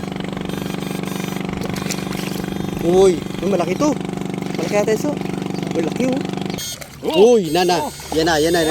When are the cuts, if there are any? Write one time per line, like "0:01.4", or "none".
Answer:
0:06.6